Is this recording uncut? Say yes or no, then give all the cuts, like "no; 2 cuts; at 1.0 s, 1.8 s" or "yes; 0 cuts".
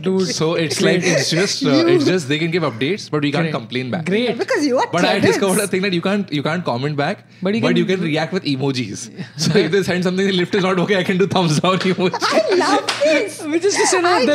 yes; 0 cuts